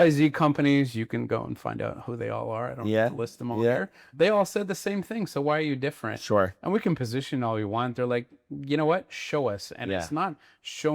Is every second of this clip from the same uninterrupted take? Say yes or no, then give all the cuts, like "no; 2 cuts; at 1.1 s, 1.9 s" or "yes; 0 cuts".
no; 1 cut; at 4.1 s